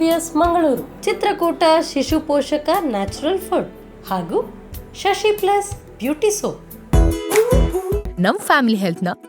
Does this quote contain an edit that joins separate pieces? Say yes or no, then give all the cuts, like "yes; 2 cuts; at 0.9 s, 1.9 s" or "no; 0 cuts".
yes; 1 cut; at 6.7 s